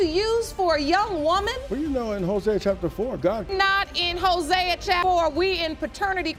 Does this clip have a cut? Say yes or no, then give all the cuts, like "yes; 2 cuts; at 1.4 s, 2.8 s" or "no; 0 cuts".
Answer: no; 0 cuts